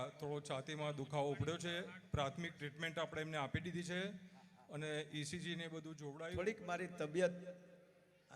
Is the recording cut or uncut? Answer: cut